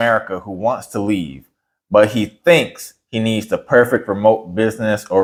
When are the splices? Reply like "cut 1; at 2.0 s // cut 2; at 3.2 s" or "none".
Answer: none